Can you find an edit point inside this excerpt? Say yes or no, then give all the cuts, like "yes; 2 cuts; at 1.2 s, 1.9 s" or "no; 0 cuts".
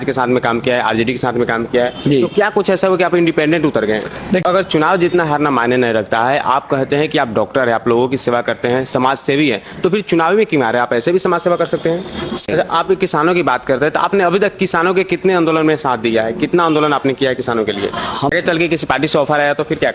yes; 3 cuts; at 4.4 s, 12.5 s, 18.3 s